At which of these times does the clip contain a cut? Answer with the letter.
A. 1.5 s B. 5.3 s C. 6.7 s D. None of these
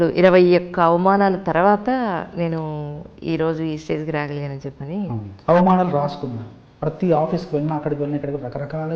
B